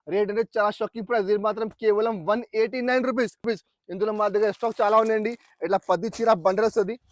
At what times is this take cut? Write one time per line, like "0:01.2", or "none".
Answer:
0:03.4